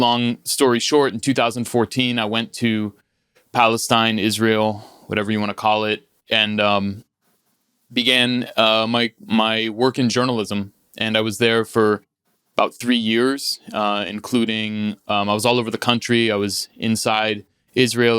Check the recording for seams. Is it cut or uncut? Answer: uncut